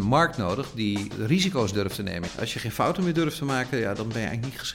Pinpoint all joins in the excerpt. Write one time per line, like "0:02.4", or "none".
0:01.1
0:02.2